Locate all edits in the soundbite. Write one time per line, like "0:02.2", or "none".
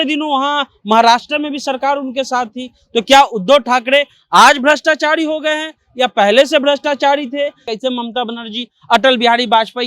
0:07.6